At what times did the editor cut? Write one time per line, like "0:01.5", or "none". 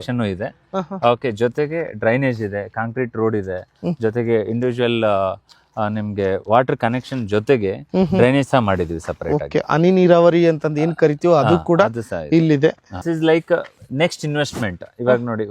0:12.9

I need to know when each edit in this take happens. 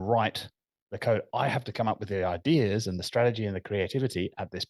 none

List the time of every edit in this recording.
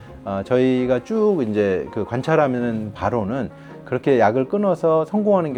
none

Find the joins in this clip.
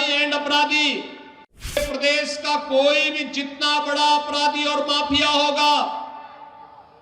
0:01.8

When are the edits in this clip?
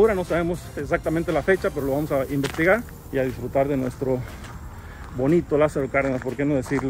0:03.0

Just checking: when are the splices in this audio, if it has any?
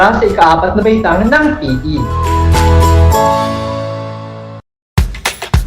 0:04.8

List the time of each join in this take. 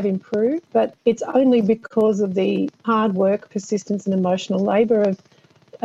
0:01.0
0:02.8

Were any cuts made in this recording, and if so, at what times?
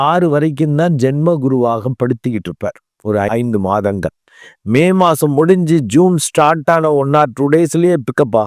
0:03.3

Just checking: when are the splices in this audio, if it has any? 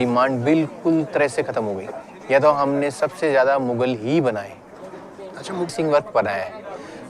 0:05.7

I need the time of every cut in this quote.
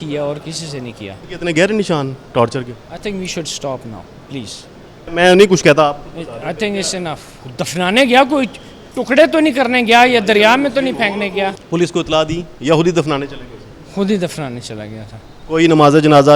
0:01.2
0:05.1
0:07.4
0:11.6

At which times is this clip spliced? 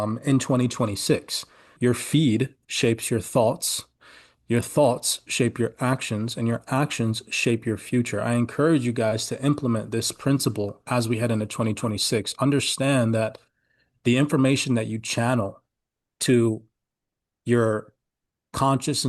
0:01.6

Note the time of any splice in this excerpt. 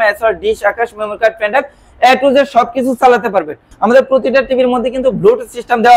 0:03.6

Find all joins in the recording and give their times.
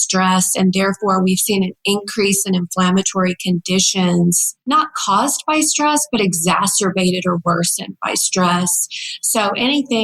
0:04.5

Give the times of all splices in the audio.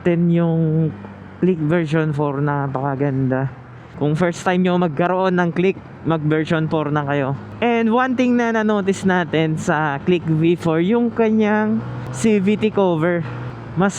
0:03.8
0:07.4

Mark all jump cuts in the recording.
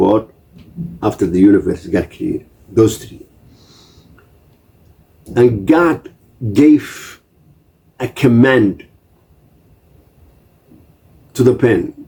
none

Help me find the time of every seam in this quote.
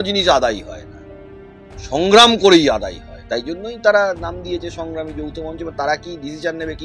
none

